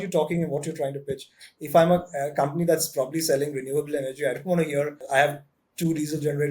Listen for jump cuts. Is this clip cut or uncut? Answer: cut